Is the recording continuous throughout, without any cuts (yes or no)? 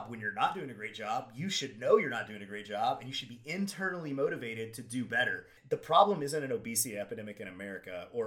no